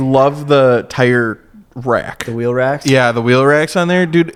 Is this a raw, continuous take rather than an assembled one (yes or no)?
yes